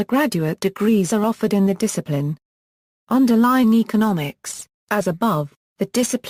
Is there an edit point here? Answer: yes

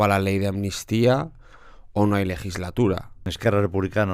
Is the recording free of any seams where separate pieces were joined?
no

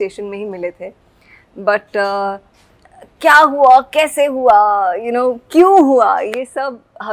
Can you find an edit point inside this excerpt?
no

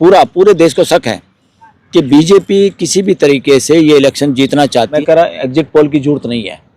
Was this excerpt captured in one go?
no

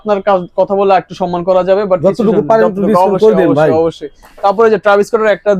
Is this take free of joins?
yes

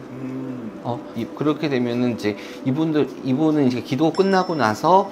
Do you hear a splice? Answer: yes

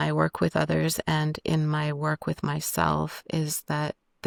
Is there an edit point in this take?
no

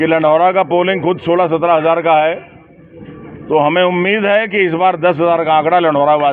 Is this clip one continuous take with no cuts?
yes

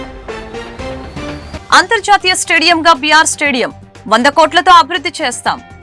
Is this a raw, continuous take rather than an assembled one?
yes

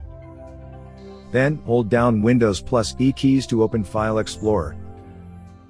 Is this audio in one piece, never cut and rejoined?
no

